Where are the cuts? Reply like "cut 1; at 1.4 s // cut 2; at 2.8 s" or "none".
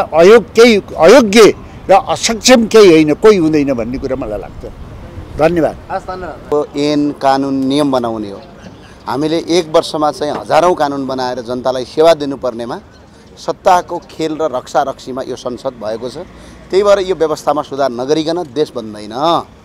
none